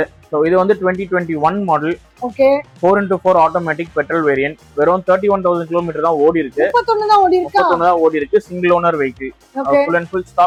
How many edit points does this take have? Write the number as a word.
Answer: zero